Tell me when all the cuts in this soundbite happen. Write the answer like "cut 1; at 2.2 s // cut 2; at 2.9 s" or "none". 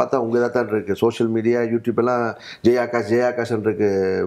none